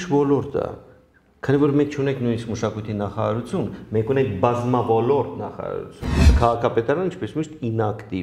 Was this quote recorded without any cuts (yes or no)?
no